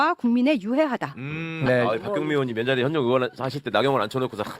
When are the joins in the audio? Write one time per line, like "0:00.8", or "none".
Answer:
0:01.6